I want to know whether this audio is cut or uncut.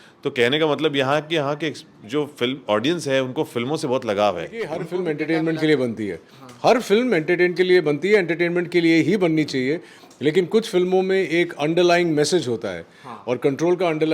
cut